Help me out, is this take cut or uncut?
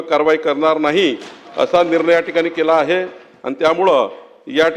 uncut